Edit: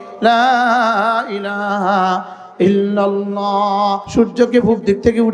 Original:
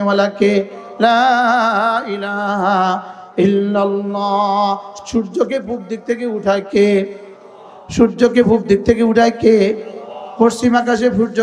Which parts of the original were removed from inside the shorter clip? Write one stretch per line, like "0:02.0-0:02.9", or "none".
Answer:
0:04.8-0:07.9